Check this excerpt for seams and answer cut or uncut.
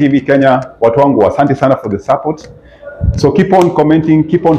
uncut